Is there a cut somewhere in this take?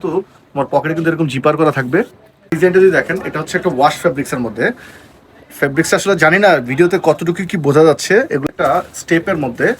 yes; 2 cuts; at 2.5 s, 8.4 s

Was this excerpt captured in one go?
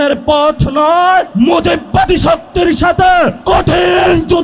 no; 2 cuts; at 1.3 s, 3.4 s

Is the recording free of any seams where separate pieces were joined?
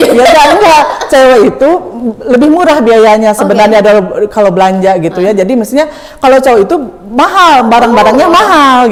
yes; 0 cuts

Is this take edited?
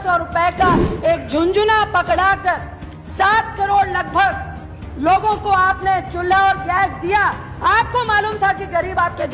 no; 0 cuts

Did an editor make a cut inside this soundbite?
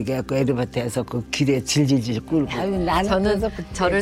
yes; 1 cut; at 2.6 s

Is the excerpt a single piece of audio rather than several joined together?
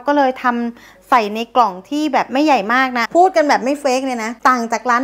no; 1 cut; at 3.0 s

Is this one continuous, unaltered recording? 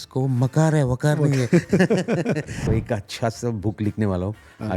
no; 1 cut; at 2.6 s

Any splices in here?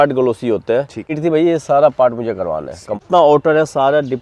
yes; 2 cuts; at 1.1 s, 3.0 s

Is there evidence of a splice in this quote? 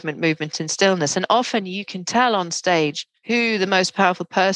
yes; 1 cut; at 3.1 s

